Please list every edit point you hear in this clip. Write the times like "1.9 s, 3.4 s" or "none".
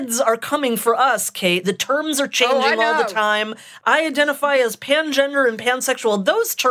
1.6 s, 3.6 s